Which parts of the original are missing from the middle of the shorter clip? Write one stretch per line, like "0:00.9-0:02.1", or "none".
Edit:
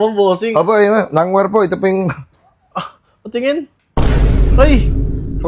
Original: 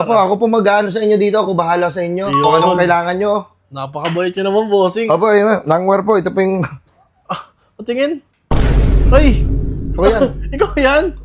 none

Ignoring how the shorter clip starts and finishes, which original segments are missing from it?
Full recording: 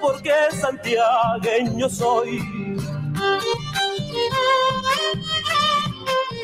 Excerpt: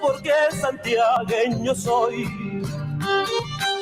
0:01.2-0:01.3

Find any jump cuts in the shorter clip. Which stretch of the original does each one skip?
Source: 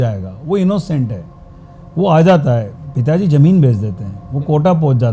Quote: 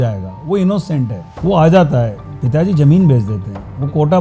0:01.2-0:01.8

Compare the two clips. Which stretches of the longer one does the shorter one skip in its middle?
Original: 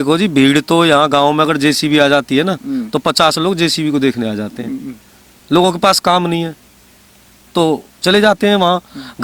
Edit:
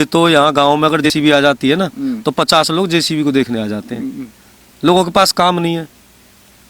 0:01.6-0:01.7

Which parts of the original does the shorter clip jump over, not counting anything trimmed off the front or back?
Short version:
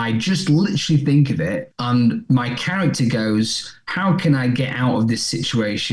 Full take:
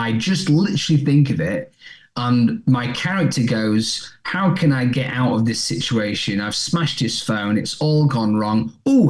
0:01.7-0:02.1

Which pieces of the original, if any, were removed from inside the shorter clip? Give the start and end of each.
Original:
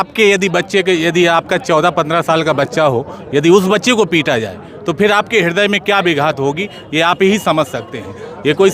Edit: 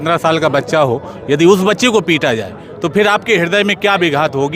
none

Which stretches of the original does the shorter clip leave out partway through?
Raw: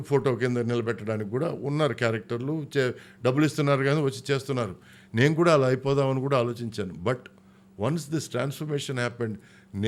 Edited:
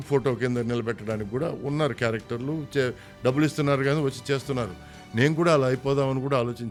none

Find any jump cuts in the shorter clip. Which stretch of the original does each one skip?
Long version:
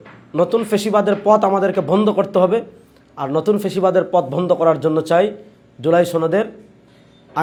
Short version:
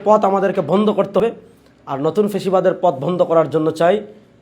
0:02.4-0:02.5

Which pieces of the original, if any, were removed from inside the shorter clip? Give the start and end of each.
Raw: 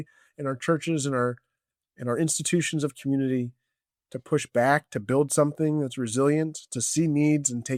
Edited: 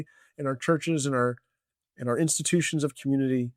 none

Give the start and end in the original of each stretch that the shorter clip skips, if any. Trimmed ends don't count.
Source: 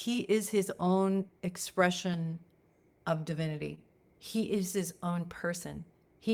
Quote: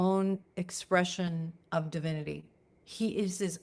0:02.4-0:02.9

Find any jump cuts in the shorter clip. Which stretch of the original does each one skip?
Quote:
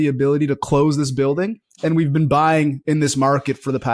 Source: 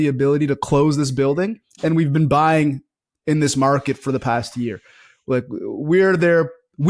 0:02.8-0:03.2

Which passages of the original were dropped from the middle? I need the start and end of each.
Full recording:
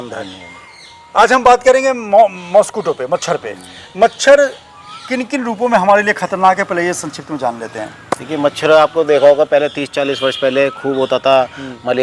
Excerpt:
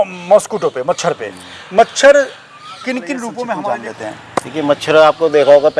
0:05.9-0:07.4

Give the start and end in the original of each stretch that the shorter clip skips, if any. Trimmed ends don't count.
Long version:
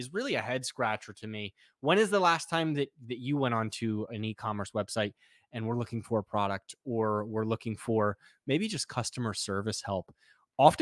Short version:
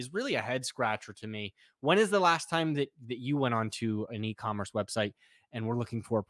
none

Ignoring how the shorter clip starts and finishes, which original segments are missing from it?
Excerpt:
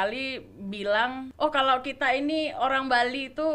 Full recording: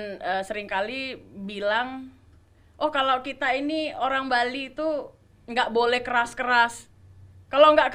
0:02.0-0:02.7

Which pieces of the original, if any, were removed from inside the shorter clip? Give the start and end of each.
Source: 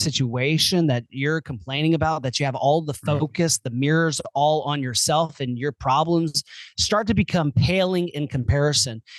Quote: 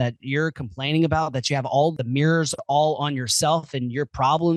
0:02.9-0:03.7

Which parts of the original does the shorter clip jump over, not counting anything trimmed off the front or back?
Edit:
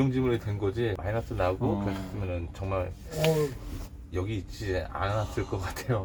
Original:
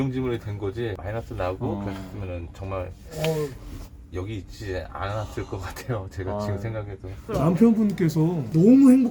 none

